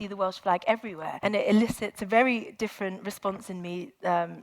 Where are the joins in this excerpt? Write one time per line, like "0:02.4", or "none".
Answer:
0:01.0
0:02.0